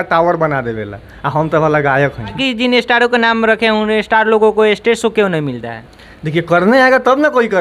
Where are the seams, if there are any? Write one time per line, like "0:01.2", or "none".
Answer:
0:02.4